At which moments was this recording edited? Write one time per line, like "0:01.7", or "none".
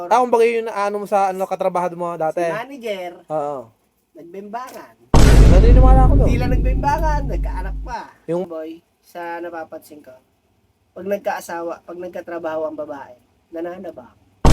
0:08.5